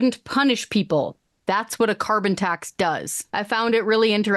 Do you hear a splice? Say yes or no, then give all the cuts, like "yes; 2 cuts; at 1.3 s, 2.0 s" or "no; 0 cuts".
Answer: yes; 1 cut; at 3.2 s